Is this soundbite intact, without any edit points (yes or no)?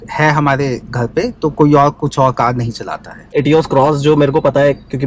no